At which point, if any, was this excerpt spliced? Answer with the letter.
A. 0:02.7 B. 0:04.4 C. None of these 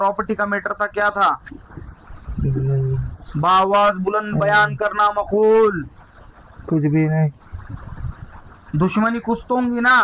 C